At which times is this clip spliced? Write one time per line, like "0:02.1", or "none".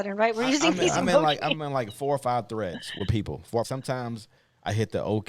0:03.7